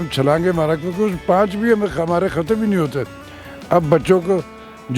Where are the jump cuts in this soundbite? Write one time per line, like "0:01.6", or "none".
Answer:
none